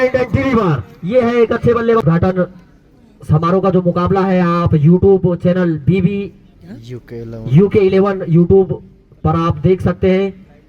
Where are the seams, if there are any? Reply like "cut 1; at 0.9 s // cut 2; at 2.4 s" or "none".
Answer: cut 1; at 2.0 s